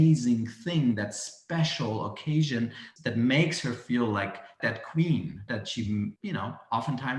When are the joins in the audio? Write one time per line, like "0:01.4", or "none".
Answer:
0:02.9
0:04.5
0:05.4
0:06.2